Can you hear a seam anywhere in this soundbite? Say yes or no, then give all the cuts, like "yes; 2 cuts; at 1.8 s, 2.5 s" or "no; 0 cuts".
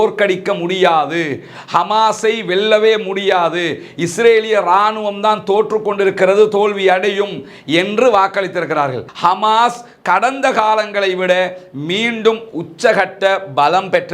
yes; 1 cut; at 9.0 s